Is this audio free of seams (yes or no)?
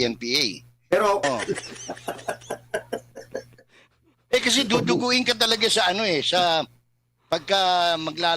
no